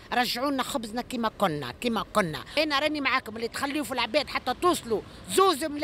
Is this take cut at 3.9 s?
no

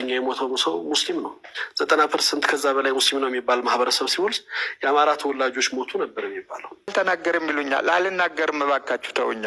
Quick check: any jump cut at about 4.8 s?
no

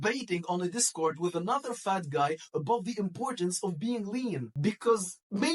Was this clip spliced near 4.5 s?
yes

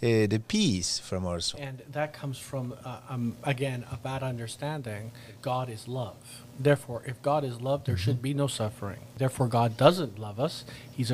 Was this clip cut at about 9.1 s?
yes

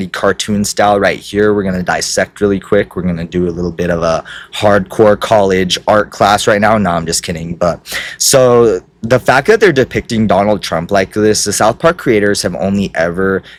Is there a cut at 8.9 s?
no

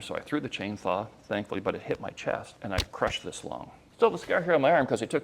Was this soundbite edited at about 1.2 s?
no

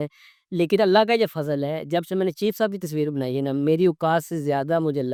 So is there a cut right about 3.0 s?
no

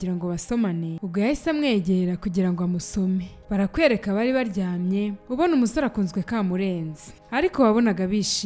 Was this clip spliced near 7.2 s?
yes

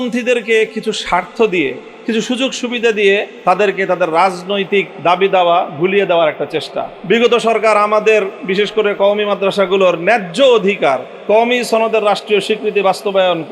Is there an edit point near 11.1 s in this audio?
yes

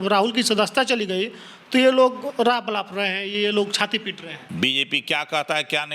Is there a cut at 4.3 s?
yes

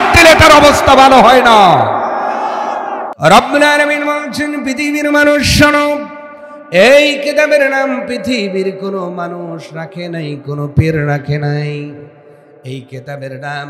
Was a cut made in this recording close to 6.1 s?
no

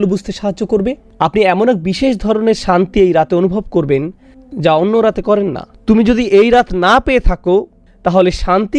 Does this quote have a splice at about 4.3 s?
no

